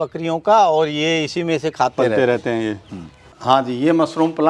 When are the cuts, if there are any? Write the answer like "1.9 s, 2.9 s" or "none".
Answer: 3.3 s